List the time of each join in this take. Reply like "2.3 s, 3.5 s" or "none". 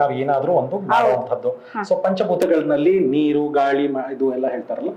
none